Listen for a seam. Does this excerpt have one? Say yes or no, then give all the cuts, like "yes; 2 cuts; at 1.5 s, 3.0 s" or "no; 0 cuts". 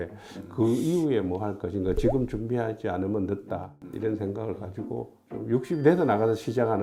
no; 0 cuts